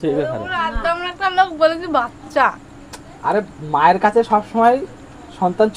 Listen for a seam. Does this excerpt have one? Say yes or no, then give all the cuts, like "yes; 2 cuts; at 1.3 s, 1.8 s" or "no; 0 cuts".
no; 0 cuts